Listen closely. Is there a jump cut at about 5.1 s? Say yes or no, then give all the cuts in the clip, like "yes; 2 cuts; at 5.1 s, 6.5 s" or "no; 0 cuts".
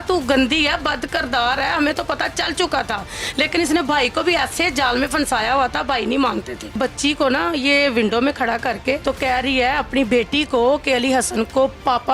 no; 2 cuts; at 6.7 s, 9.0 s